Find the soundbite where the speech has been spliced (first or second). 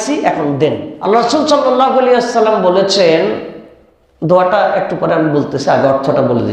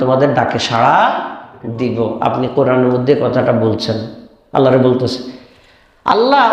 first